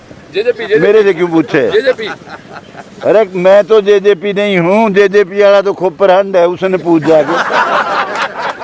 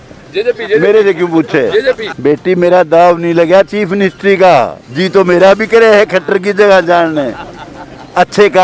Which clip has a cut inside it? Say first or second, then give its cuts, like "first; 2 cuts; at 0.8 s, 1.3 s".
second; 1 cut; at 2.1 s